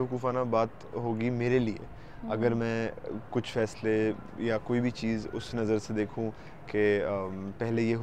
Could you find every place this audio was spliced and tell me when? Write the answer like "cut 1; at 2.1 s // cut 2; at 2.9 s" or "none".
none